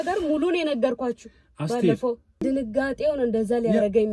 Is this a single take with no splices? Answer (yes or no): no